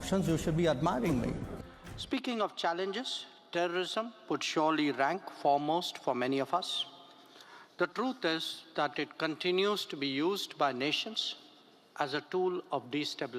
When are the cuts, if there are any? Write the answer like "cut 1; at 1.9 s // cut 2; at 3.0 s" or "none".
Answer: cut 1; at 1.5 s